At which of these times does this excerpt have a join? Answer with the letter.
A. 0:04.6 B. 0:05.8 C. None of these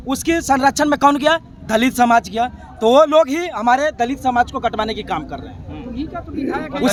C